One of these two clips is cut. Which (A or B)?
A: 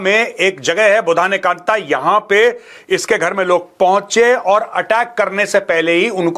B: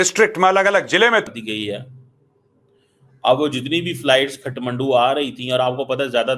B